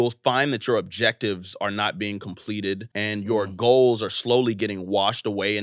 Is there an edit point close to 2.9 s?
yes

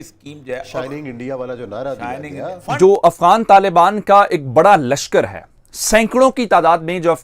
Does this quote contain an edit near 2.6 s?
yes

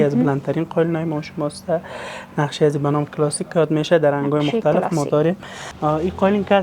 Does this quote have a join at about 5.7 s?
yes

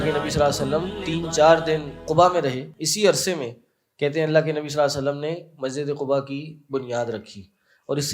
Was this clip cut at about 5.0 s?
no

